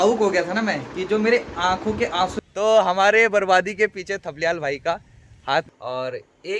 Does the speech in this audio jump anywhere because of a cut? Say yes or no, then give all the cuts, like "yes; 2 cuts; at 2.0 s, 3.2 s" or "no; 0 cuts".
yes; 2 cuts; at 2.4 s, 5.7 s